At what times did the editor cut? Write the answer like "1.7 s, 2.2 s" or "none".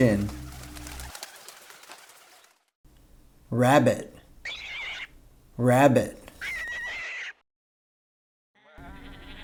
none